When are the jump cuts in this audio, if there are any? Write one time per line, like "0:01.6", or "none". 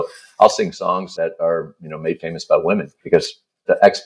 0:01.1
0:02.9